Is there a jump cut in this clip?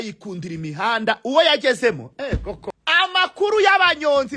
yes; 1 cut; at 2.6 s

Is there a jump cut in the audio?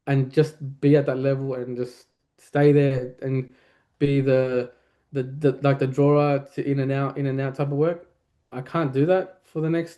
no; 0 cuts

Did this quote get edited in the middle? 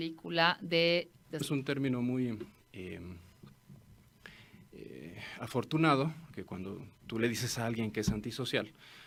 no; 0 cuts

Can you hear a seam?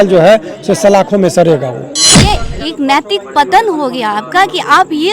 yes; 1 cut; at 2.2 s

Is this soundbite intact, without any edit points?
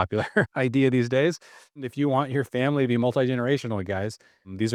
yes; 0 cuts

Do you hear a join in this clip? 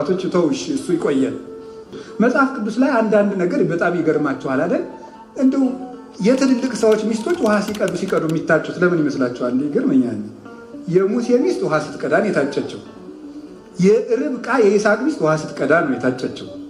yes; 1 cut; at 2.0 s

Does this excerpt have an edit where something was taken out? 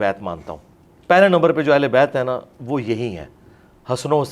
no; 0 cuts

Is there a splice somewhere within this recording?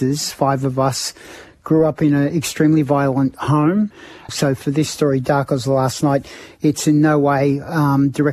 yes; 1 cut; at 4.2 s

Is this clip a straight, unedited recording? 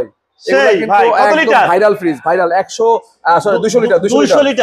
yes; 0 cuts

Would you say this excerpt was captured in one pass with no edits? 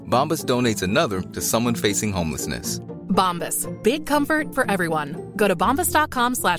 yes; 0 cuts

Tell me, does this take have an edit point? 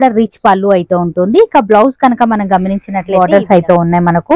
yes; 1 cut; at 3.2 s

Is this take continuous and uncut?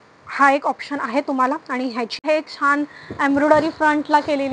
no; 1 cut; at 2.2 s

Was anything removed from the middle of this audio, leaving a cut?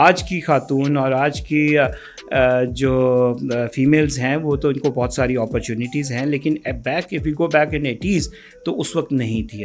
no; 0 cuts

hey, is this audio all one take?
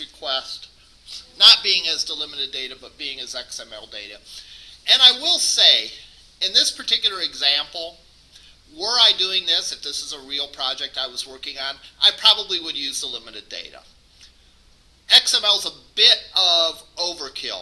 yes; 0 cuts

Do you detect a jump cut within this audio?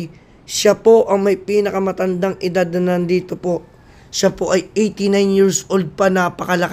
no; 0 cuts

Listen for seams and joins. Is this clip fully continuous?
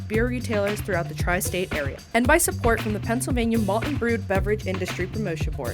no; 1 cut; at 2.0 s

